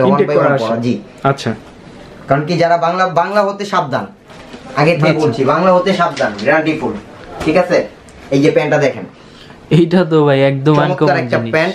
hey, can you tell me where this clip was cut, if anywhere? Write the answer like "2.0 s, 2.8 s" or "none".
none